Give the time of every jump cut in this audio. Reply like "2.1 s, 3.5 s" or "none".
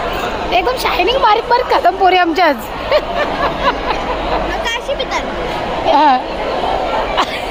none